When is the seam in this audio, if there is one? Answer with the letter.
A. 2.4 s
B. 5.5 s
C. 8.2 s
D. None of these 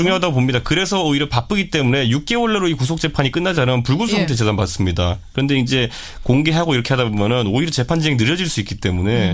D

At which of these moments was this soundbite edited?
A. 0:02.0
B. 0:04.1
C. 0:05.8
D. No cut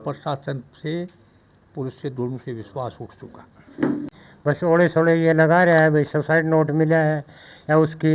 B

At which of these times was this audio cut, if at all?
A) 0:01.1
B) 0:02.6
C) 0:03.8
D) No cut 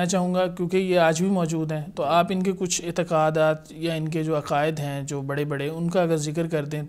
D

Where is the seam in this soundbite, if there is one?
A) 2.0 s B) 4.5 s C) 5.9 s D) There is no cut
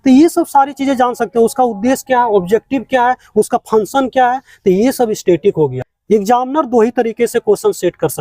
C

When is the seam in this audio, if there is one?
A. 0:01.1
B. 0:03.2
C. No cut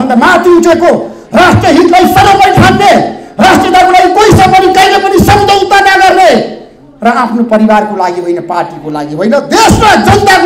C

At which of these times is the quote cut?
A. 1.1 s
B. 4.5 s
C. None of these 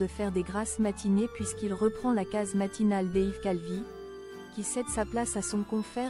C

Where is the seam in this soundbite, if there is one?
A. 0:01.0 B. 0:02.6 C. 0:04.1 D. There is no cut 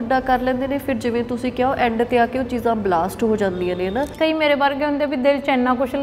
C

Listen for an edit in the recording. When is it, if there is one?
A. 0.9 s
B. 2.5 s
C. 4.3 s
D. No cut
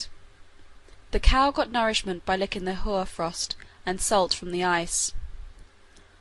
B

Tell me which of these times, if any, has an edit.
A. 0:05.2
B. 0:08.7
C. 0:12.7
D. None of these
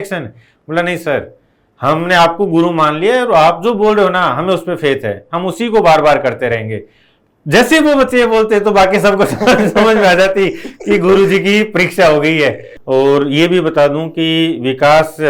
C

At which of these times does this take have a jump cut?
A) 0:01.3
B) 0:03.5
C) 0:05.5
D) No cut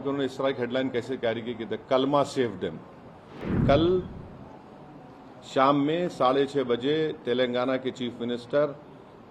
B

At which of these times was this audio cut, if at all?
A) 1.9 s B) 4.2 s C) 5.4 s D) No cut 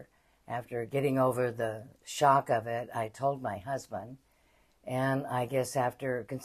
D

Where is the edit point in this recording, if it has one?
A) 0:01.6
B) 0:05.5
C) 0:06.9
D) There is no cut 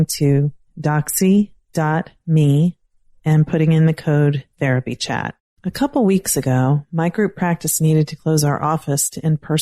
B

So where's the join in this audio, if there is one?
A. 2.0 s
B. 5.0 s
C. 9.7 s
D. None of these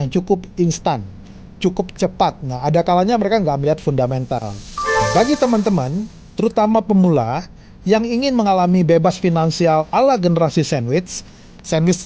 B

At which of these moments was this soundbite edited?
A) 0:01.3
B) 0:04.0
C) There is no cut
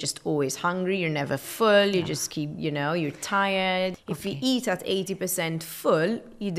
B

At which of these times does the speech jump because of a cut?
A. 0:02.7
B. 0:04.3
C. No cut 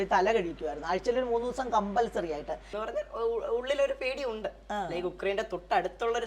A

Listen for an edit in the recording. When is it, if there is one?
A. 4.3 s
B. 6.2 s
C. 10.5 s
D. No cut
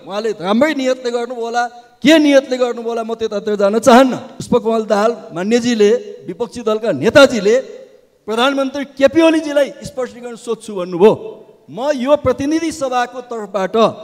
A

